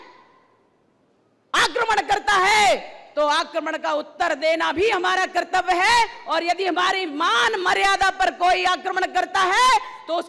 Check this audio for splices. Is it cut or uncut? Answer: uncut